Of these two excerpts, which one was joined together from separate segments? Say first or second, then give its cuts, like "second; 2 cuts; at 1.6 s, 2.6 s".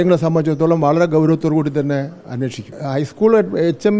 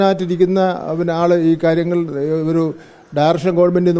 first; 1 cut; at 2.8 s